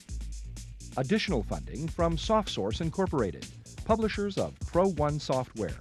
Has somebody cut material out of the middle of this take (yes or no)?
no